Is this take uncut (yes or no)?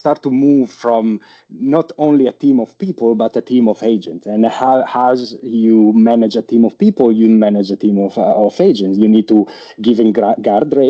yes